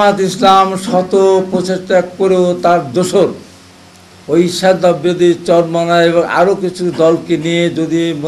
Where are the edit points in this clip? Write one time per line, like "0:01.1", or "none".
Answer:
none

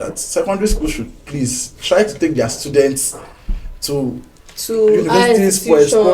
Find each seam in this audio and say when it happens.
none

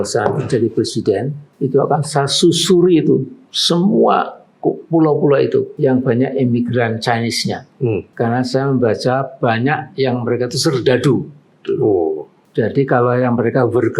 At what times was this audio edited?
0:01.4
0:05.7
0:08.1
0:12.3

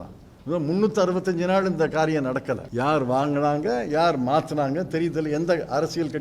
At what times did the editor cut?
0:02.7

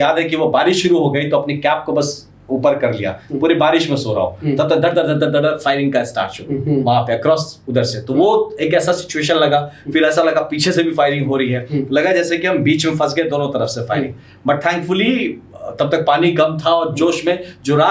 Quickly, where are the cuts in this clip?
none

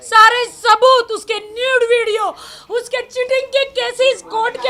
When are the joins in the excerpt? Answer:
none

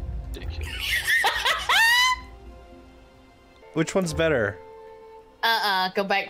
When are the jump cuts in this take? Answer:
0:03.5

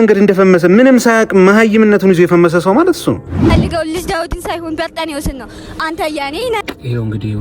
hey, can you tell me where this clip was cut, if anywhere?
0:03.6

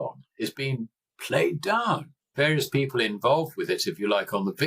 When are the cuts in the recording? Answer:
0:02.2

